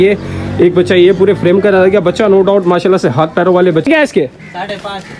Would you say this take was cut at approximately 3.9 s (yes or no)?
yes